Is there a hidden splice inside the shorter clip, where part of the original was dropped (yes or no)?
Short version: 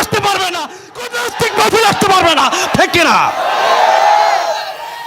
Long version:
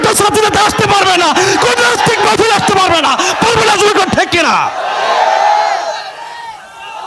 yes